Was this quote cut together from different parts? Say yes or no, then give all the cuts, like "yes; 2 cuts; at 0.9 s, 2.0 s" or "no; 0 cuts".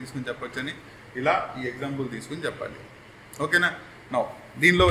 no; 0 cuts